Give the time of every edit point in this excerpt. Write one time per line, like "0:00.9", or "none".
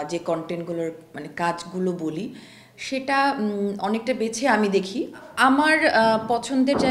0:05.2